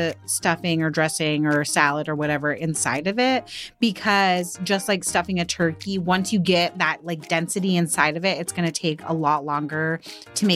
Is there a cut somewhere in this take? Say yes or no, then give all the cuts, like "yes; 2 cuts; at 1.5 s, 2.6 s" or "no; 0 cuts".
no; 0 cuts